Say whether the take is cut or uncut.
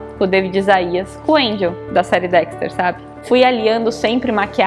cut